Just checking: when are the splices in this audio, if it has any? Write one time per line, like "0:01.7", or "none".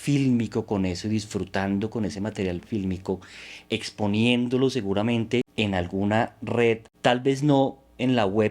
0:05.5
0:06.9